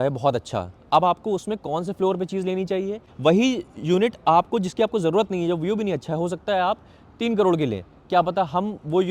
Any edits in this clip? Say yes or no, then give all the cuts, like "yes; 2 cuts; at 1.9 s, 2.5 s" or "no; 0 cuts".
yes; 1 cut; at 3.0 s